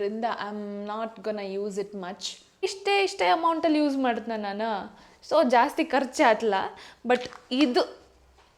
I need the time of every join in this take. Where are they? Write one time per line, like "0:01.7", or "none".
0:02.6